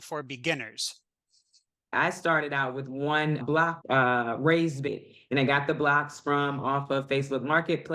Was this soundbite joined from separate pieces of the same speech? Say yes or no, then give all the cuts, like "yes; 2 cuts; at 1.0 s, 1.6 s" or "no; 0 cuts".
yes; 1 cut; at 1.8 s